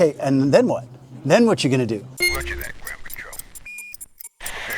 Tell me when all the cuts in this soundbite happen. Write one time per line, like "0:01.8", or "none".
0:02.2